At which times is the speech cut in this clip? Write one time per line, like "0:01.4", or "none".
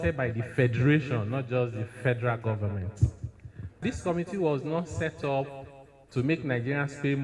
0:03.8